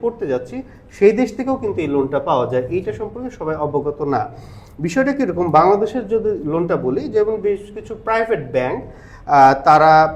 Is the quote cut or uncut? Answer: uncut